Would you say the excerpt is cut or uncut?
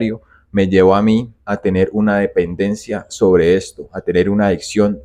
uncut